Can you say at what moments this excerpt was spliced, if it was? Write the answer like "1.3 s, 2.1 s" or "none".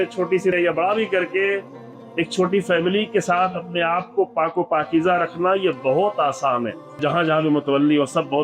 7.0 s